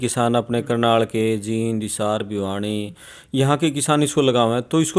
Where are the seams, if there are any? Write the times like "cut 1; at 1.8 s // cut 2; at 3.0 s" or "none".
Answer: none